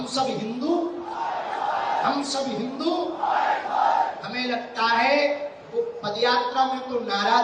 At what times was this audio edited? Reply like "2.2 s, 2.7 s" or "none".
none